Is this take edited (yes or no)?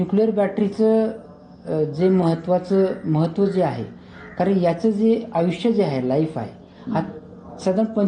no